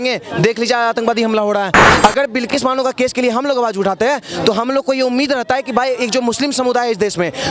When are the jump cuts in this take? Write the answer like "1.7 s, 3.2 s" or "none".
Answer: 1.8 s